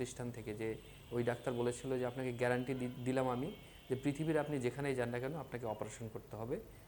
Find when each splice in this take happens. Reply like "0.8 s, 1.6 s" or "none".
0.9 s